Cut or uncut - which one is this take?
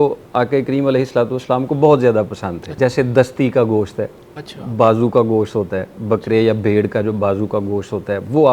cut